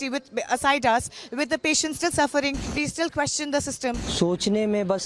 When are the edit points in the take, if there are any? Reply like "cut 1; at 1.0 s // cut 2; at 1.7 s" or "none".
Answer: cut 1; at 2.6 s // cut 2; at 4.0 s